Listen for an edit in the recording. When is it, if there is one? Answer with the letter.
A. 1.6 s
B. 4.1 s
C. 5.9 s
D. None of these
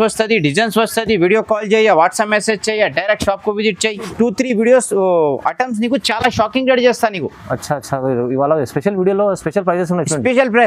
B